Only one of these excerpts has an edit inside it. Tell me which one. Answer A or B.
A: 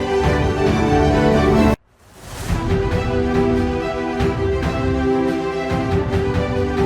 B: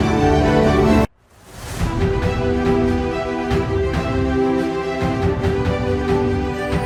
A